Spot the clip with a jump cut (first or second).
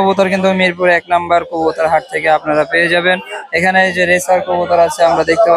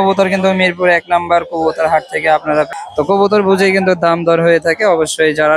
second